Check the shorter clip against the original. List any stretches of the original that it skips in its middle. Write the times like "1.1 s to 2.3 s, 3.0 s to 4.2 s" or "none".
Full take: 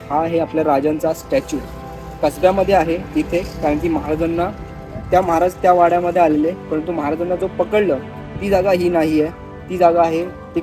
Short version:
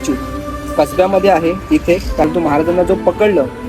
3.7 s to 6.8 s